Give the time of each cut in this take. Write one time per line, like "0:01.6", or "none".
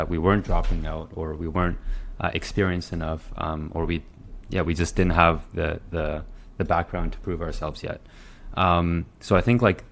none